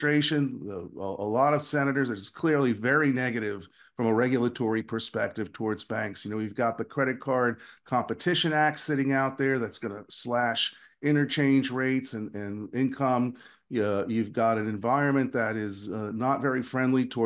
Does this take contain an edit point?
no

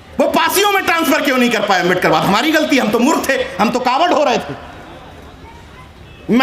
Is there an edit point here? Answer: no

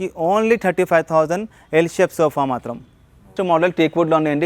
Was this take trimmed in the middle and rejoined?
yes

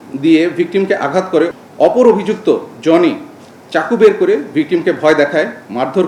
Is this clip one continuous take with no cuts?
no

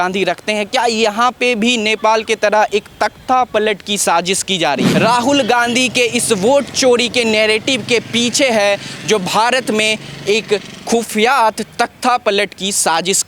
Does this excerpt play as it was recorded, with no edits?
no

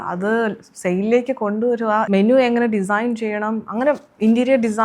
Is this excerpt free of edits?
no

